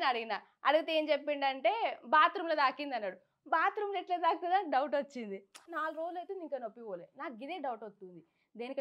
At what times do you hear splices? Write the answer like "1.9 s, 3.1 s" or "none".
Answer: 5.7 s

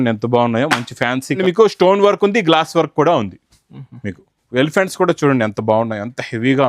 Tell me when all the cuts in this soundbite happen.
1.4 s

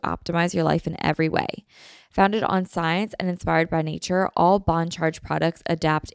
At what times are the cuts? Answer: none

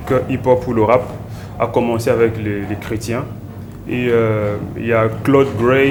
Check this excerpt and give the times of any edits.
none

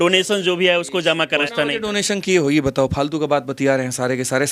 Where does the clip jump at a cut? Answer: 1.5 s

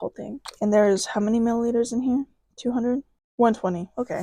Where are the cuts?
none

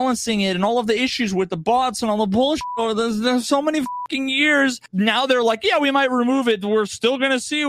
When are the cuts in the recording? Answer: 4.8 s

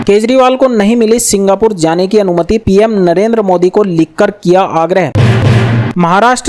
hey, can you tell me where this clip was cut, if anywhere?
5.1 s

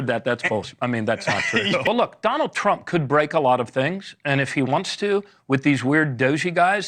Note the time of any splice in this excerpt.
1.9 s

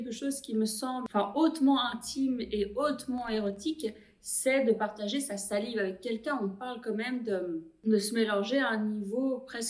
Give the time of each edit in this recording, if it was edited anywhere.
1.1 s

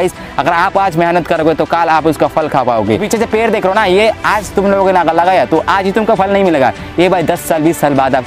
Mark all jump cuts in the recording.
3.0 s

